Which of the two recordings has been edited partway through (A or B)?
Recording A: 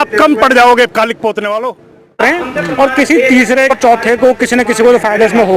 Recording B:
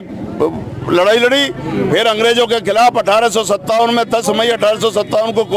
A